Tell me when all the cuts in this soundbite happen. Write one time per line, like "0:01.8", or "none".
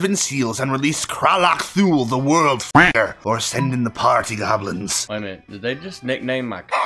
0:02.8
0:05.0